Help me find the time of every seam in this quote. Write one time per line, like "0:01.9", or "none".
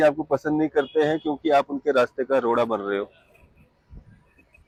none